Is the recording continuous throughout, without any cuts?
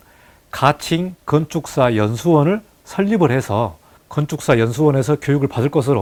yes; 0 cuts

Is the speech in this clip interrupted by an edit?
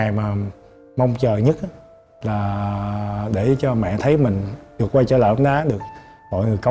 no; 0 cuts

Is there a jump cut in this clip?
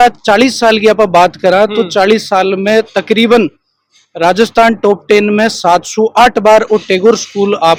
no; 0 cuts

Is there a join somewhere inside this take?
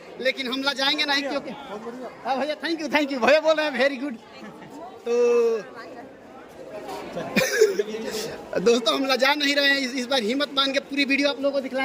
no; 0 cuts

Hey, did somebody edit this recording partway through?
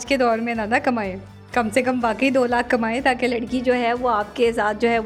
no; 0 cuts

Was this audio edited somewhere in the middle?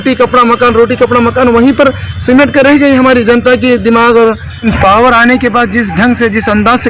yes; 1 cut; at 4.6 s

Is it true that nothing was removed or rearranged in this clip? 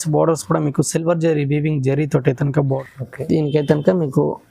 no; 1 cut; at 2.8 s

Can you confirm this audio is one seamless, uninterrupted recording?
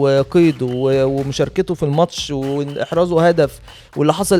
yes; 0 cuts

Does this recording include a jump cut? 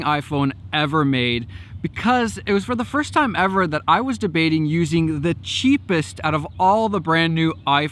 no; 0 cuts

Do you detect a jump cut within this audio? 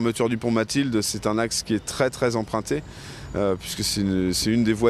yes; 1 cut; at 1.1 s

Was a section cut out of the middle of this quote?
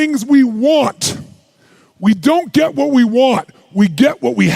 no; 0 cuts

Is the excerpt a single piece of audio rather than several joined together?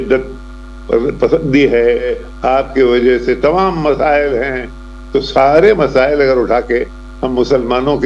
no; 1 cut; at 2.1 s

